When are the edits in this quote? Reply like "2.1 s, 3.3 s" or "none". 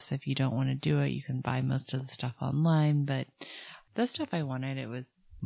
3.8 s